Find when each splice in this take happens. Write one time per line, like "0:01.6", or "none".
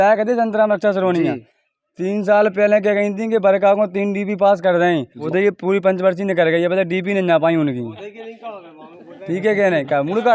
0:05.2